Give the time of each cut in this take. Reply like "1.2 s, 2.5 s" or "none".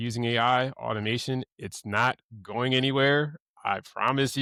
none